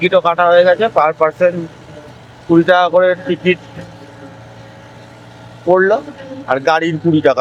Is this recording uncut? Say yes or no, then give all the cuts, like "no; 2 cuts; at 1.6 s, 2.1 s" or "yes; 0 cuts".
yes; 0 cuts